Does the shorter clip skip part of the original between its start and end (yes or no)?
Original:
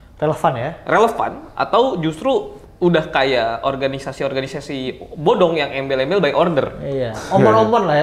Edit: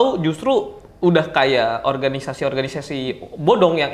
no